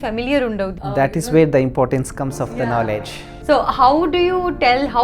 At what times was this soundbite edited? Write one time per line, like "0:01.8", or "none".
0:00.9